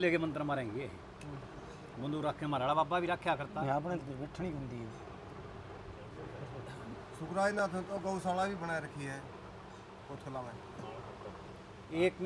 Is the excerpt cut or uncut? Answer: uncut